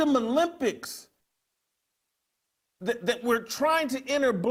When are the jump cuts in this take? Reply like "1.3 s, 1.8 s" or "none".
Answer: none